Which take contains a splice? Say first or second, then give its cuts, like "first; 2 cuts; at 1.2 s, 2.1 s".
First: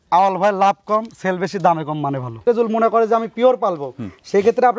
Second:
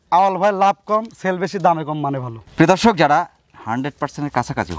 first; 1 cut; at 2.3 s